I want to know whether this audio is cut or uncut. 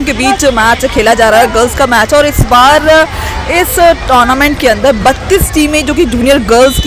uncut